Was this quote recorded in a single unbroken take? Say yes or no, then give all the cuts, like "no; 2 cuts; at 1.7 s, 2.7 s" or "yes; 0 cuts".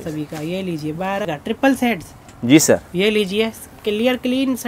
no; 1 cut; at 1.2 s